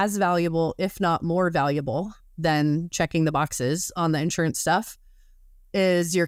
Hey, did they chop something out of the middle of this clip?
no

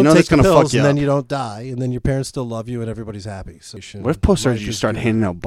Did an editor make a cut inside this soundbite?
yes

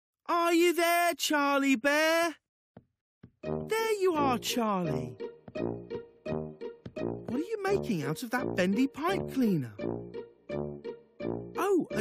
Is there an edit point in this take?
yes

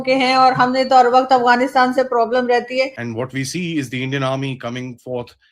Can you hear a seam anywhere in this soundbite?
yes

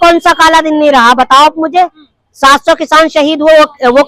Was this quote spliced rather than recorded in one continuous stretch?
no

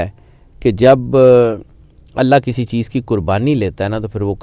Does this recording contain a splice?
no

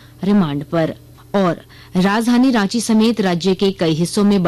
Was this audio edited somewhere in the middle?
no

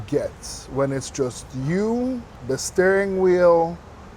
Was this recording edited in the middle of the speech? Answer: yes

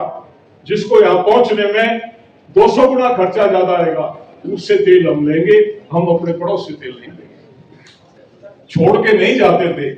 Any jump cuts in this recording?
yes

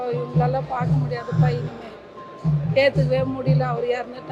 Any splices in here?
no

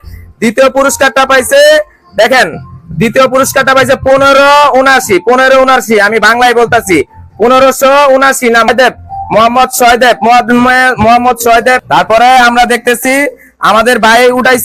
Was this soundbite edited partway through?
yes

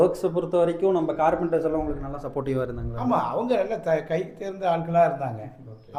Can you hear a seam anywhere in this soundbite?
no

